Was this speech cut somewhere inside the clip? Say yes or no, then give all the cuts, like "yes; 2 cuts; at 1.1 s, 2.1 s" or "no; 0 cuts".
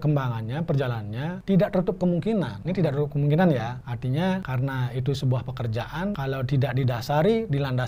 yes; 5 cuts; at 1.4 s, 2.6 s, 3.8 s, 4.5 s, 6.2 s